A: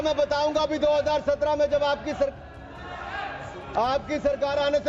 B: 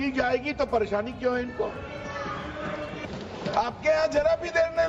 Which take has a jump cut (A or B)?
B